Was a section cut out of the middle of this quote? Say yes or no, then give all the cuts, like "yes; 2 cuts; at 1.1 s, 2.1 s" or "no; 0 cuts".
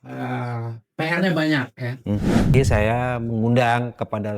yes; 1 cut; at 2.5 s